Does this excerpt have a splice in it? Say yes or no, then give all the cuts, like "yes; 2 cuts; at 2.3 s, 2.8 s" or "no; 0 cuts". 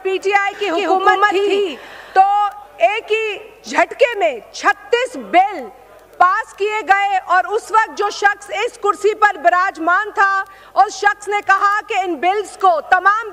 no; 0 cuts